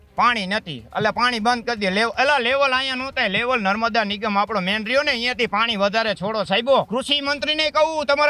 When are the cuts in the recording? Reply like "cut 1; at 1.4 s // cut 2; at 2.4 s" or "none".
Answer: cut 1; at 6.9 s